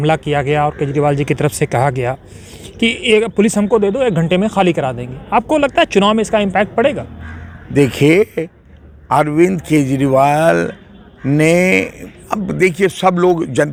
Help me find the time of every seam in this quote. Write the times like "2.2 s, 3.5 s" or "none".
none

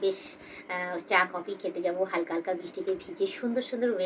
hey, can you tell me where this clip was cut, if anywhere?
none

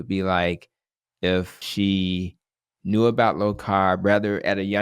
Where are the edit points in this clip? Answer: 1.6 s

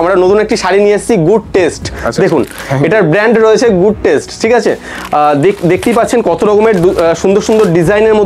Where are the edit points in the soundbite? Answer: none

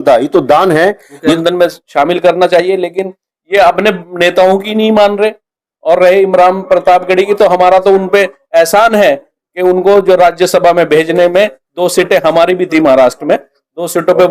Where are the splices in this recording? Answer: 1.4 s

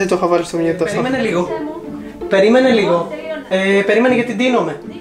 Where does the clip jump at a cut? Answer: 0.9 s

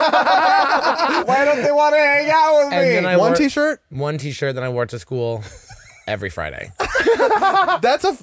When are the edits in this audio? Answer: 1.2 s

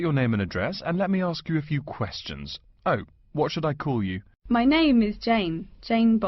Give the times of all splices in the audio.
4.3 s

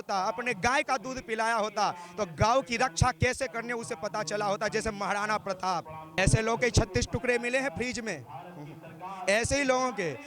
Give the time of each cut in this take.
6.2 s

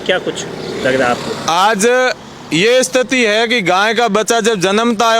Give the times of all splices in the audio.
none

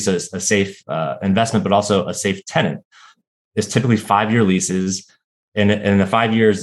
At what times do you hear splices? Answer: none

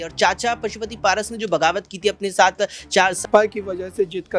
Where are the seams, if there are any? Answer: 3.2 s

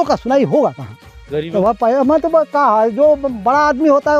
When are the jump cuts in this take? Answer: 1.5 s

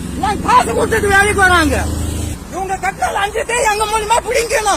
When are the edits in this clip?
2.3 s

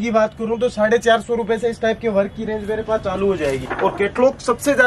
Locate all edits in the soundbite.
3.6 s

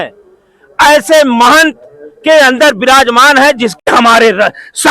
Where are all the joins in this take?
3.8 s

